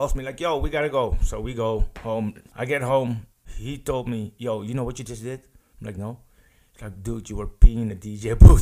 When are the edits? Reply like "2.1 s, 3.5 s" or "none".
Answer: 2.4 s, 3.5 s